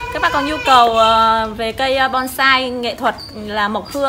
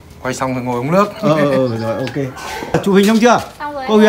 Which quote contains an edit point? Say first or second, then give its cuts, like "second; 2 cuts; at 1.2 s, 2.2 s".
second; 1 cut; at 2.7 s